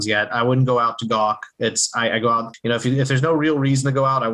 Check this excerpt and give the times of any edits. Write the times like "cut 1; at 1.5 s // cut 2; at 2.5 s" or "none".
cut 1; at 2.5 s